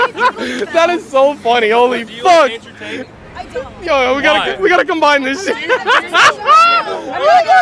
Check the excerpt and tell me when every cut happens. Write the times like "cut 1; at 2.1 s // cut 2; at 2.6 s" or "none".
none